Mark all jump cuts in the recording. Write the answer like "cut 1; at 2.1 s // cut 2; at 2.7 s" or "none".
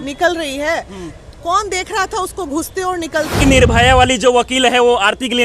cut 1; at 3.4 s